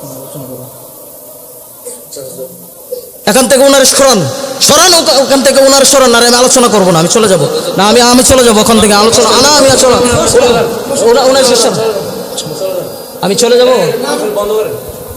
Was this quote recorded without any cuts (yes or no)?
yes